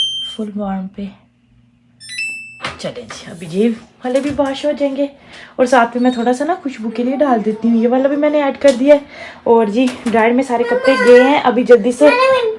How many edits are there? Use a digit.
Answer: 0